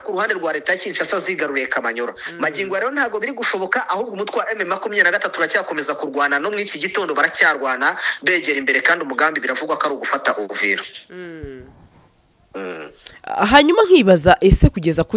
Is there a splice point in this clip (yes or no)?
no